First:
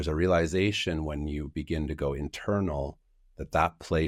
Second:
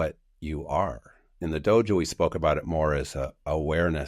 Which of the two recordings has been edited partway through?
second; 1 cut; at 1.3 s

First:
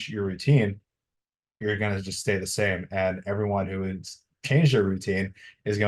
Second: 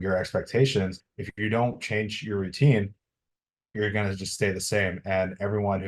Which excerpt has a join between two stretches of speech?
second; 1 cut; at 1.1 s

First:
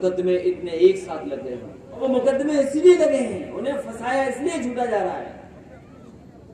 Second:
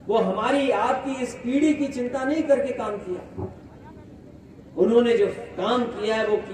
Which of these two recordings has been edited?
first; 1 cut; at 2.0 s

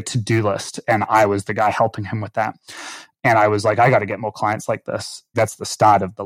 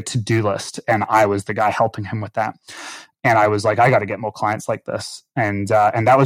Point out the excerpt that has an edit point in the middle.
first; 1 cut; at 5.3 s

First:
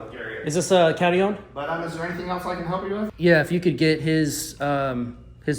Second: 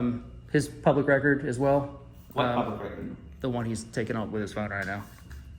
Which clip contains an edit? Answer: first; 2 cuts; at 1.5 s, 3.1 s

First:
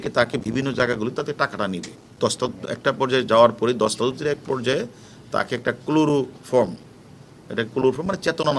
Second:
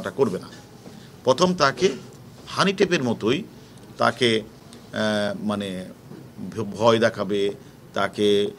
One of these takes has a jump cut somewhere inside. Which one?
first; 1 cut; at 2.1 s

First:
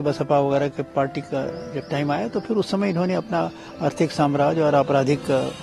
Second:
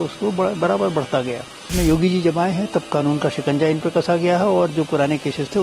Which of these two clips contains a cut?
second; 1 cut; at 1.7 s

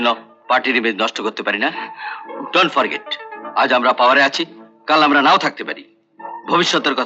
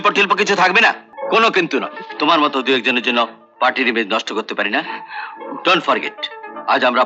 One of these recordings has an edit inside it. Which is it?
second; 1 cut; at 1.1 s

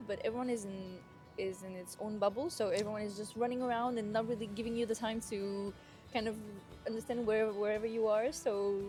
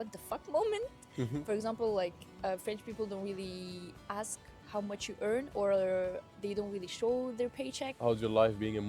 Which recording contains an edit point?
second; 2 cuts; at 1.4 s, 7.8 s

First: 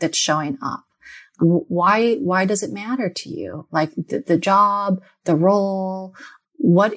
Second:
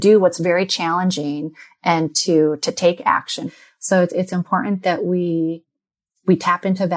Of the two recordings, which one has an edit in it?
second; 1 cut; at 3.5 s

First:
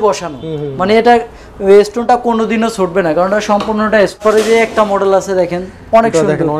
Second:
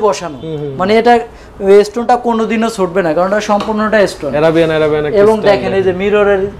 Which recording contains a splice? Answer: first; 1 cut; at 4.2 s

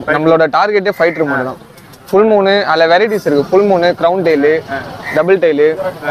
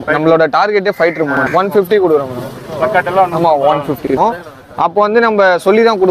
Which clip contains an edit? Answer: second; 2 cuts; at 1.4 s, 4.1 s

